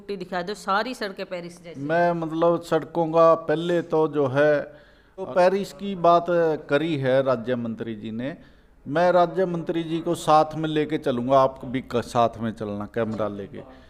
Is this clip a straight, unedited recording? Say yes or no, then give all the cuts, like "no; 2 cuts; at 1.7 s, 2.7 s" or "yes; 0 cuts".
yes; 0 cuts